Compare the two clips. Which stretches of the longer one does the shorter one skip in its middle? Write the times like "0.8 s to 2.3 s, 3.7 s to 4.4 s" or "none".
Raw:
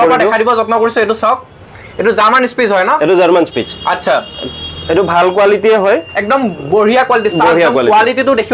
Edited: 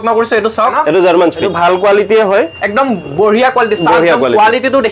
1.4 s to 2.9 s, 3.6 s to 5.0 s